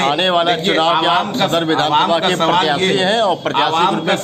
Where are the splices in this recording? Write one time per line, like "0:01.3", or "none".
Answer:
none